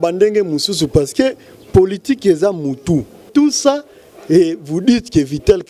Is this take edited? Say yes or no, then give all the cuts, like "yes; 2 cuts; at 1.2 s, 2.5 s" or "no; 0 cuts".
yes; 1 cut; at 3.3 s